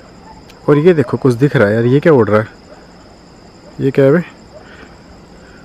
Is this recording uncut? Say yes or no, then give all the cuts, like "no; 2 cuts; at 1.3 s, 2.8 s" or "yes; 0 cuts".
yes; 0 cuts